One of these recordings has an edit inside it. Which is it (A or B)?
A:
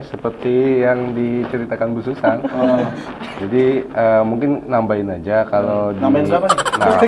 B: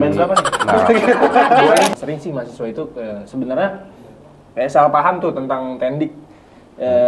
B